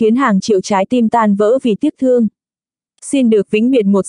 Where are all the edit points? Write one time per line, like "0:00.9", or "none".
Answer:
0:01.6